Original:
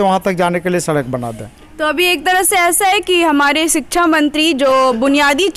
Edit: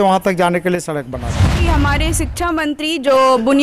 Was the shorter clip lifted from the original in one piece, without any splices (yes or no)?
no